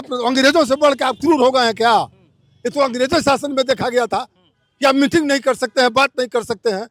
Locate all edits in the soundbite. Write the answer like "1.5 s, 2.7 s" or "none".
none